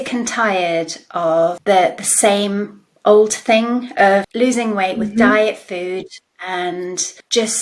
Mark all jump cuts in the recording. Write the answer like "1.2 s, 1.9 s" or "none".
1.6 s